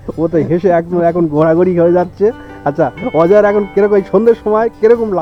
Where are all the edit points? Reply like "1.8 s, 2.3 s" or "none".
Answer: none